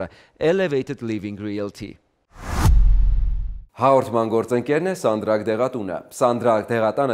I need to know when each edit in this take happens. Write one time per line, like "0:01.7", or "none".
0:02.3